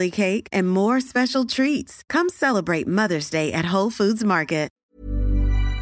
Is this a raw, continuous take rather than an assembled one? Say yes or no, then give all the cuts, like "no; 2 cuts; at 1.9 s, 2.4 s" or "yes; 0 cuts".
no; 1 cut; at 4.8 s